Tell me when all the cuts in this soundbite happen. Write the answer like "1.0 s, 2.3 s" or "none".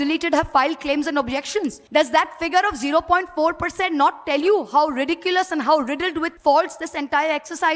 1.8 s, 6.3 s